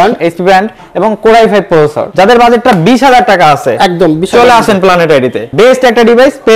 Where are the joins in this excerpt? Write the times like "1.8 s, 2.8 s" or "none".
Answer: 2.0 s, 5.4 s